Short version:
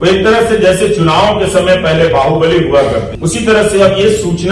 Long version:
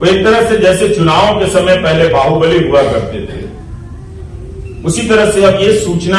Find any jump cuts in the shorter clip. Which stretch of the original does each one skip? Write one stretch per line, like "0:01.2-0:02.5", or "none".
0:03.1-0:04.7